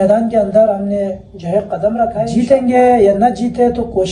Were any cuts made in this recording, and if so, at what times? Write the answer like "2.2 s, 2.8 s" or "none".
2.3 s

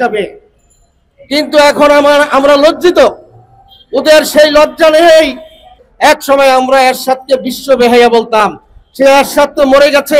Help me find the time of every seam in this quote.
5.8 s

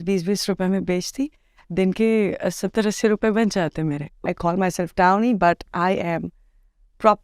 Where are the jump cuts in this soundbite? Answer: 4.2 s

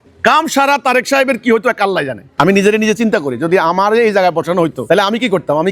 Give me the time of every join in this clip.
2.2 s, 4.8 s

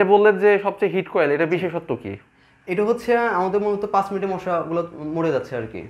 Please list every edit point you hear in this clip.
none

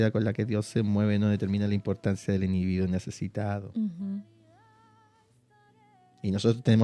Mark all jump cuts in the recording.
none

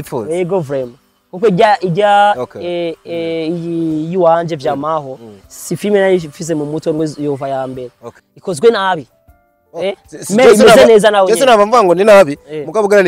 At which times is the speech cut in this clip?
8.0 s

